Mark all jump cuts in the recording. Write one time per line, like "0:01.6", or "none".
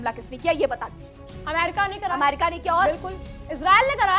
none